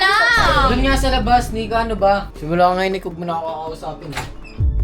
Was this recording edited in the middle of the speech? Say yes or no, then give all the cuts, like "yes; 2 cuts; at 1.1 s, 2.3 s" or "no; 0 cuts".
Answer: yes; 1 cut; at 2.3 s